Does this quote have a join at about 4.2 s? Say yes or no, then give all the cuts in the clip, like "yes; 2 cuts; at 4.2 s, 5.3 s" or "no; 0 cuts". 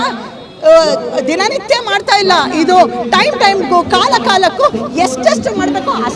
no; 0 cuts